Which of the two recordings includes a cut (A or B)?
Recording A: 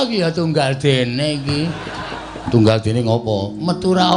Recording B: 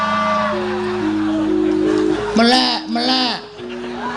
B